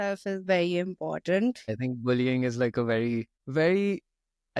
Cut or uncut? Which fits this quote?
cut